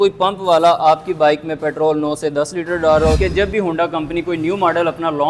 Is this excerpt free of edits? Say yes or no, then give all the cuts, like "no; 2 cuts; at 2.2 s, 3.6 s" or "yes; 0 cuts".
no; 1 cut; at 3.2 s